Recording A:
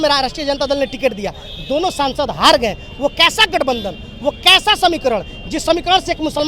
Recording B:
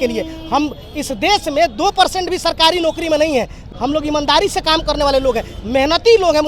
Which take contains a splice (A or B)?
B